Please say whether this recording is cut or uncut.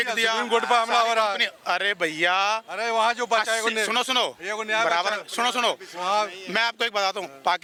uncut